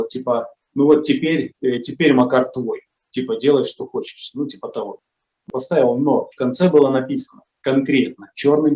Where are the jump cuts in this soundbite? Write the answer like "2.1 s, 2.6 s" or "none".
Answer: 5.4 s